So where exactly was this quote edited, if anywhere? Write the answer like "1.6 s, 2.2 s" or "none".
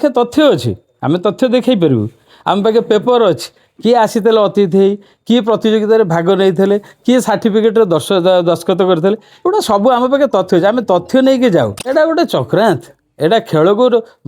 11.9 s